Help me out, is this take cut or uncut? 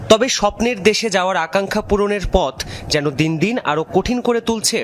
uncut